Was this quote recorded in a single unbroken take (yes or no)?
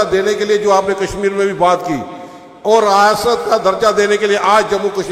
yes